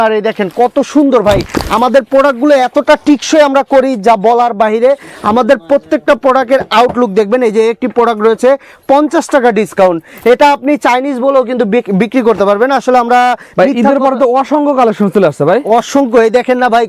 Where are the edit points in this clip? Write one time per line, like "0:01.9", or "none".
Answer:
none